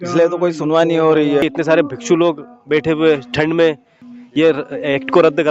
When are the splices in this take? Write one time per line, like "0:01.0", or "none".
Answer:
0:01.4
0:04.1